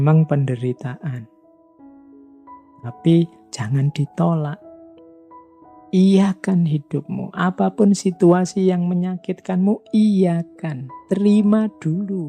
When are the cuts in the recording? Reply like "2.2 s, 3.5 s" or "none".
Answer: none